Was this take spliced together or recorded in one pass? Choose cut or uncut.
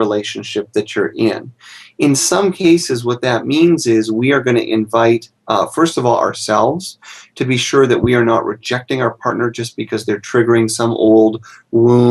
cut